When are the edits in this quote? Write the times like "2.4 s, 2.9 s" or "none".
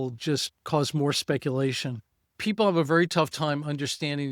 2.3 s